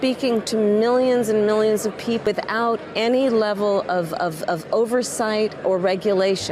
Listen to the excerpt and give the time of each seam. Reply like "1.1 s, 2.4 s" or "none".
2.3 s, 5.6 s